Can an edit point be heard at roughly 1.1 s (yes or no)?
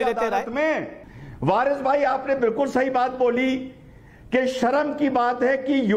yes